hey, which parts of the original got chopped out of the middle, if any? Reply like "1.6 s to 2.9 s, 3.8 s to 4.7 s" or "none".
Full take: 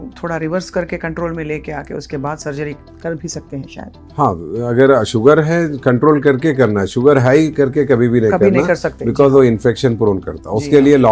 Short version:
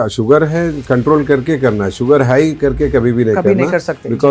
none